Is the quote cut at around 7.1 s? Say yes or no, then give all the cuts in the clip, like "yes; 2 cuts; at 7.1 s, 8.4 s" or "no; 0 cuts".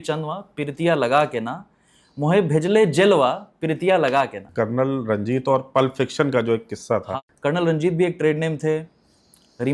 yes; 2 cuts; at 4.4 s, 7.1 s